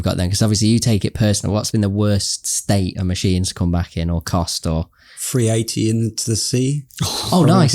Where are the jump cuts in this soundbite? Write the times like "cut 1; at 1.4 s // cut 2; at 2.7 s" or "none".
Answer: cut 1; at 1.7 s